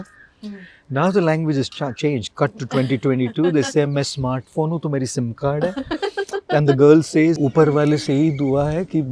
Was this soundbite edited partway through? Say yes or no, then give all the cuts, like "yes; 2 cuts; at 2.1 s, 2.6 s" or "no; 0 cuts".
yes; 1 cut; at 7.4 s